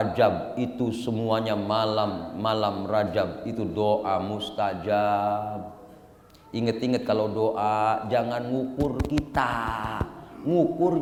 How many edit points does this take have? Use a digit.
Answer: 0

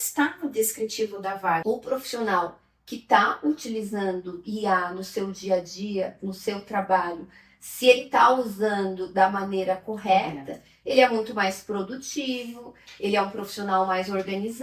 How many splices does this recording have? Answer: 1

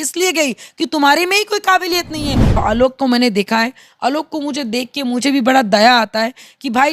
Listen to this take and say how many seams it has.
1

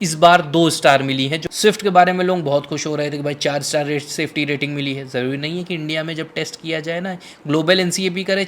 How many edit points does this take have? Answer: 1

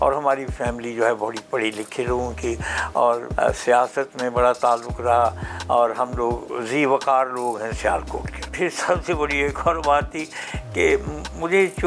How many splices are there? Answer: 2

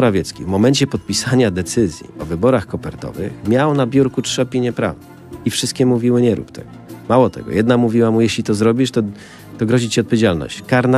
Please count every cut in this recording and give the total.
0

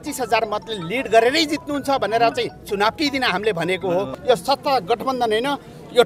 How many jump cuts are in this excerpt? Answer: 1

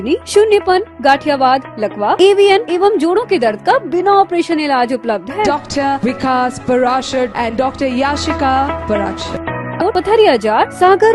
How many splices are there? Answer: 1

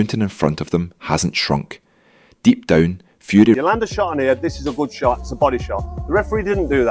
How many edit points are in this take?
1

